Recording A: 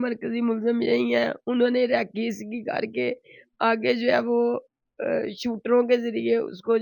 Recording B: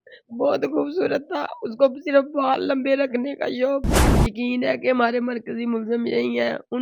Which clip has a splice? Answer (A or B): B